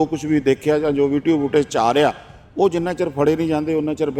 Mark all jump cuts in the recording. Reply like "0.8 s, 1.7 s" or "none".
none

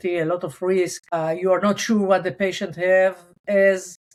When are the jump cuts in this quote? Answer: none

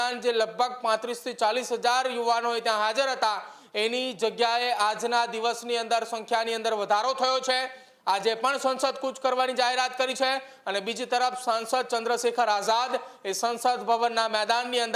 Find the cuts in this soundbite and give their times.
none

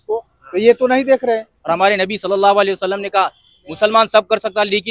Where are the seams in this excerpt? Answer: 1.5 s

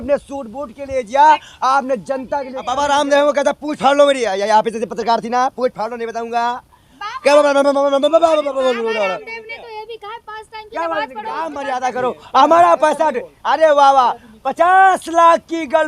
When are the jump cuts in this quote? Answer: 2.6 s, 11.6 s

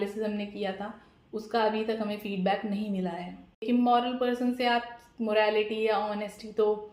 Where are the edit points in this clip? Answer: 3.6 s

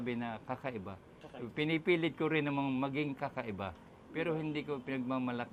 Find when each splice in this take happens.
none

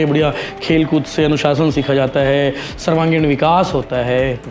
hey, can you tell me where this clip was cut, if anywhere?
none

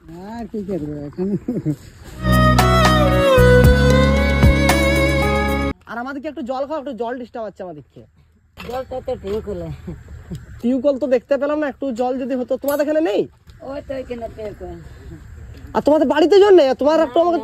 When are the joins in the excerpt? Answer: 5.7 s

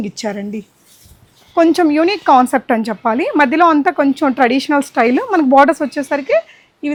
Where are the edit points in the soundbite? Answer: none

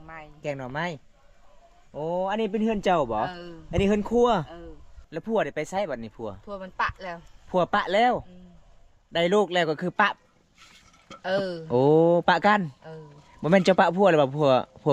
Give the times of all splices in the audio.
5.0 s

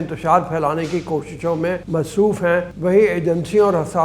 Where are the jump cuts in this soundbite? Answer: 1.8 s, 2.7 s

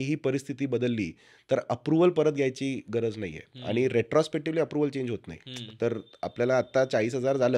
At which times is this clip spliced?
none

